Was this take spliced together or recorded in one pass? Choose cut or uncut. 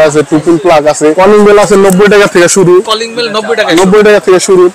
cut